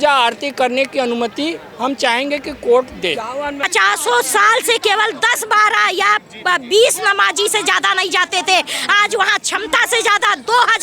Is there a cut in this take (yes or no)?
yes